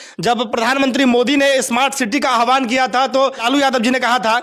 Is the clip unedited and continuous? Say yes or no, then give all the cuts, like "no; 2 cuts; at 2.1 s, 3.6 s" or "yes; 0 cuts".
no; 1 cut; at 3.4 s